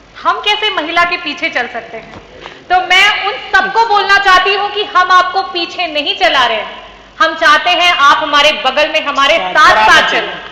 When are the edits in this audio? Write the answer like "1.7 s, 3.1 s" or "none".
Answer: none